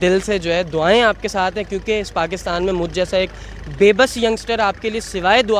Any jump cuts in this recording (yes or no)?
no